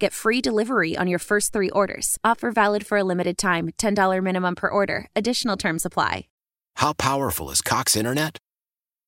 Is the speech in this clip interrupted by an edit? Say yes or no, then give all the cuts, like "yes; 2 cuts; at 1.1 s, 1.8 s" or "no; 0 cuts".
yes; 1 cut; at 6.3 s